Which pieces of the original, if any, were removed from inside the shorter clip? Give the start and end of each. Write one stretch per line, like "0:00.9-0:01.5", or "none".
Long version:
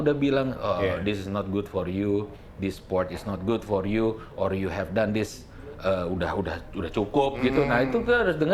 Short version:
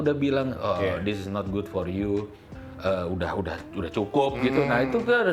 0:02.4-0:05.4

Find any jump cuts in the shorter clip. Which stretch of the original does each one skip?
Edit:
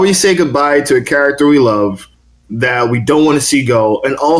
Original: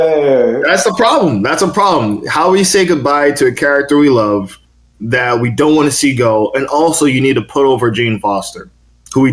none

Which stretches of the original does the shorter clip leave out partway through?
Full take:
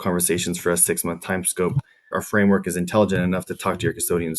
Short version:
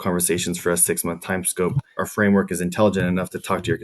0:01.9-0:02.0

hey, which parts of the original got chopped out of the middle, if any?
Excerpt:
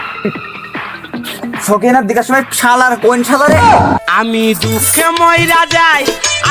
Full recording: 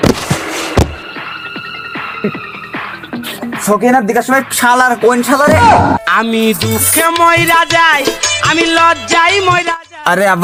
none

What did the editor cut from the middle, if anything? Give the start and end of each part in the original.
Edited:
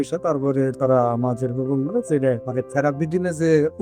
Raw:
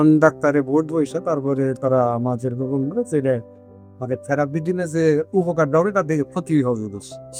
0:03.5-0:04.0

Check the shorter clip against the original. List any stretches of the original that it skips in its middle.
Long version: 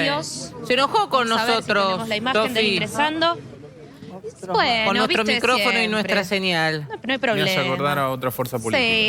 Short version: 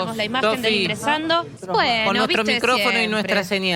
0:03.5-0:04.4

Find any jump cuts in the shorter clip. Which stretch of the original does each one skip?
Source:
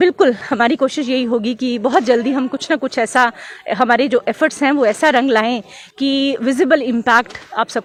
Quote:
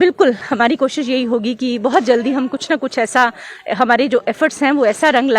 none

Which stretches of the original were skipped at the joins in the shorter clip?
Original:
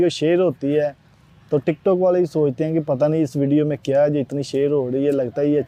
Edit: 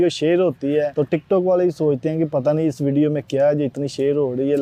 0:00.9-0:01.5

